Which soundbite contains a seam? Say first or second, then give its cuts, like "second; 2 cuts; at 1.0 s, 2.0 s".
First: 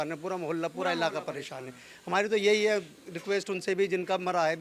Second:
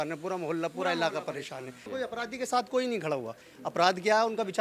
second; 1 cut; at 1.8 s